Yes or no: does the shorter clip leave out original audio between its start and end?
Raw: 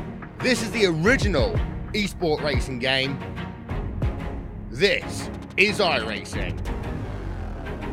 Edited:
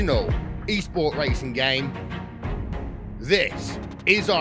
yes